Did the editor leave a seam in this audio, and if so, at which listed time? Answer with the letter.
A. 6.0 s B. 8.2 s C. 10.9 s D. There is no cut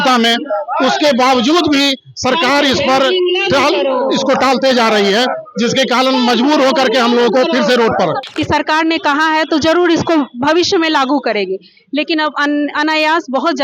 B